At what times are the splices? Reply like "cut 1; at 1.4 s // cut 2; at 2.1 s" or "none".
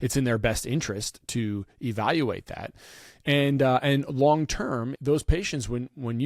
cut 1; at 4.9 s

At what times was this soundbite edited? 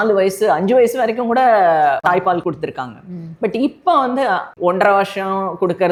none

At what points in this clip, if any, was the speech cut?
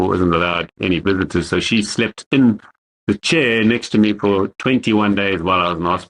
none

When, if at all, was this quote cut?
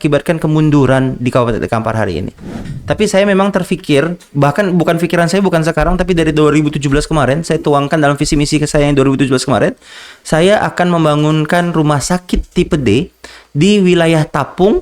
cut 1; at 2.7 s

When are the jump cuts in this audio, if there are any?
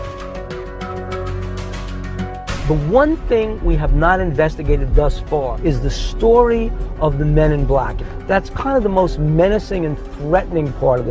cut 1; at 4.5 s

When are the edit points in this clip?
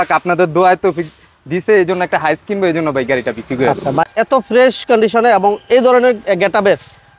cut 1; at 4.0 s

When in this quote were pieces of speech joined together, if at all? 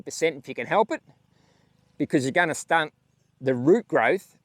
none

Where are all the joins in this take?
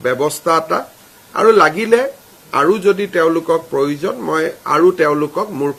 none

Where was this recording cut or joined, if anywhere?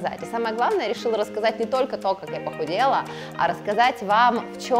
none

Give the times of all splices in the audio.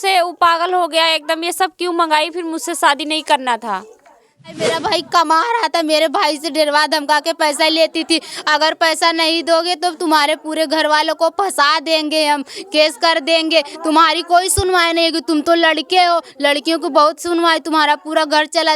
cut 1; at 4.6 s

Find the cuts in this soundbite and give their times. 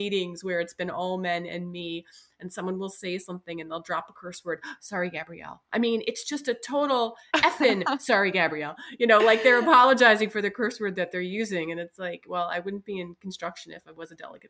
none

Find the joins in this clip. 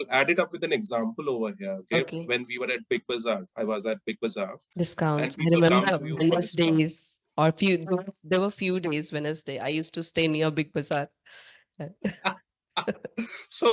cut 1; at 4.6 s

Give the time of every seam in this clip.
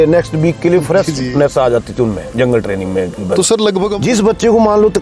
cut 1; at 4.0 s

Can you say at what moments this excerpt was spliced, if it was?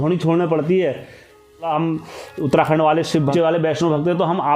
cut 1; at 1.7 s // cut 2; at 3.3 s

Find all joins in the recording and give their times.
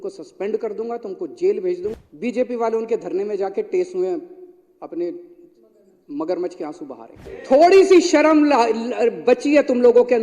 cut 1; at 1.9 s // cut 2; at 7.2 s

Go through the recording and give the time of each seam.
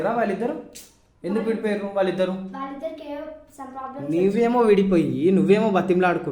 none

